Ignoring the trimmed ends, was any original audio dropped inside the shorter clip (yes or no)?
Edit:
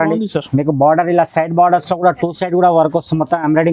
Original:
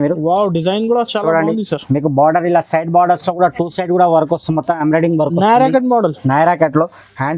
no